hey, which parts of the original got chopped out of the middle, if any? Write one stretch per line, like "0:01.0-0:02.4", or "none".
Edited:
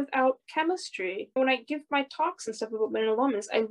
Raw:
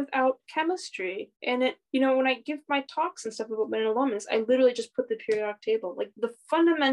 0:01.4-0:02.2